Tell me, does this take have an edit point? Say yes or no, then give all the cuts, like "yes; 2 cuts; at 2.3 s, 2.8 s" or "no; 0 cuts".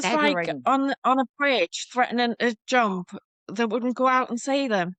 no; 0 cuts